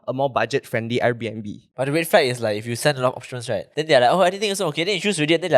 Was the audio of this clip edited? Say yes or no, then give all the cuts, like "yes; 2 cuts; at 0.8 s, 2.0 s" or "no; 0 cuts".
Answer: yes; 2 cuts; at 1.7 s, 3.7 s